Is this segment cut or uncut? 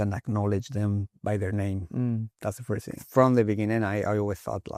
cut